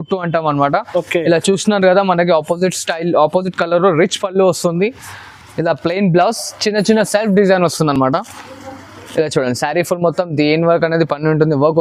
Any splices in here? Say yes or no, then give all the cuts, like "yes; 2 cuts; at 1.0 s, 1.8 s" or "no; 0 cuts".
no; 0 cuts